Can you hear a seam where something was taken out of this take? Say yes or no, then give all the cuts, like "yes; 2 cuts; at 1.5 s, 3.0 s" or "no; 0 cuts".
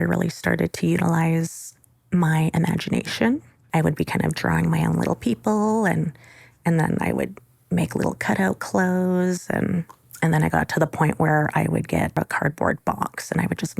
yes; 3 cuts; at 3.6 s, 10.0 s, 12.2 s